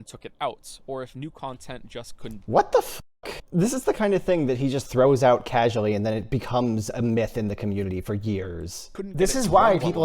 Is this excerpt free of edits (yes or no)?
no